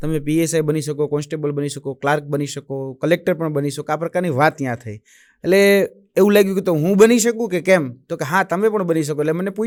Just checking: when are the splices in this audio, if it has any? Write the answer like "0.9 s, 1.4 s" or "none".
none

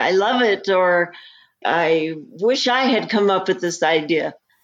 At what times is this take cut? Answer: none

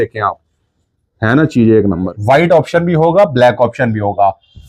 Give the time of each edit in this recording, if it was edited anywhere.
2.1 s

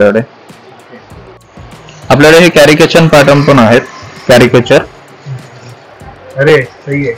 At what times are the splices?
1.4 s

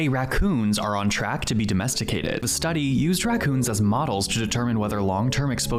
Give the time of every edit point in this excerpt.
none

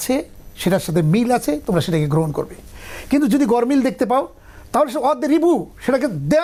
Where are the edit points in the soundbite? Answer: none

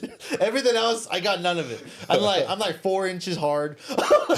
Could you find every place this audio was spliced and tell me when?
none

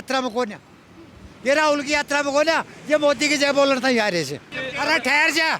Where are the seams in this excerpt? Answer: 4.5 s

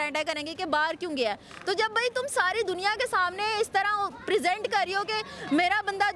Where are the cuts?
none

